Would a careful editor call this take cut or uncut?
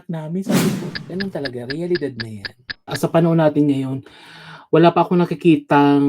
cut